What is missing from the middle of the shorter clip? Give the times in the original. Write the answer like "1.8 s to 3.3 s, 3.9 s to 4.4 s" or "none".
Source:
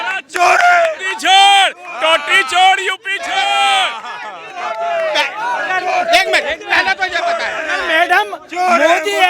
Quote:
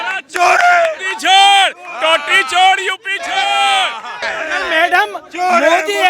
4.3 s to 7.5 s